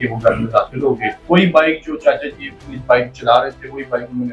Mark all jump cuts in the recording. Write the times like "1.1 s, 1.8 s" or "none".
1.1 s